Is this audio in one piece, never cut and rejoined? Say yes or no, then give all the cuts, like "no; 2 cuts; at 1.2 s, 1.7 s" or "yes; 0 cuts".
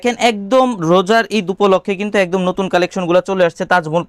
yes; 0 cuts